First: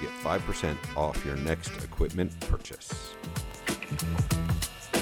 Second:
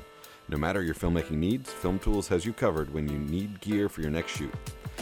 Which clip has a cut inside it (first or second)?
first